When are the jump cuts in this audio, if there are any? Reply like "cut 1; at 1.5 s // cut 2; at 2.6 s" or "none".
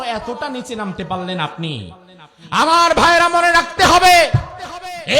none